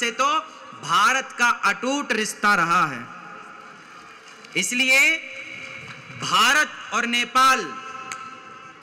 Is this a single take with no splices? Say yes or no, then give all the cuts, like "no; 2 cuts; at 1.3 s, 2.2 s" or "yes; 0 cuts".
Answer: yes; 0 cuts